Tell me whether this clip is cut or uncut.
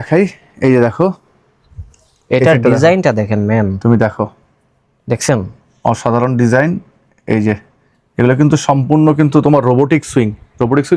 uncut